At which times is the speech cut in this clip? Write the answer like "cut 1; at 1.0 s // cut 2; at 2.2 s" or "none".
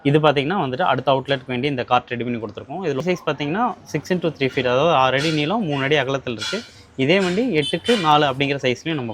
cut 1; at 3.0 s